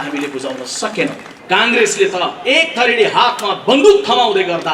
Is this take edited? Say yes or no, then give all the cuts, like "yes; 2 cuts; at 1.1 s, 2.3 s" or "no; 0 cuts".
yes; 1 cut; at 1.3 s